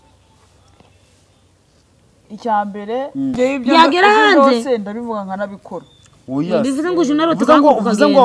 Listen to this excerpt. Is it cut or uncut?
cut